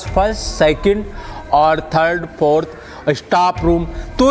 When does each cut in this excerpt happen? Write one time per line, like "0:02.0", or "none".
none